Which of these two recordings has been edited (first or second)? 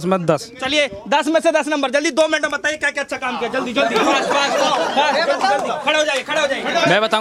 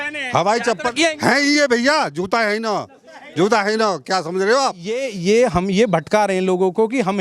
second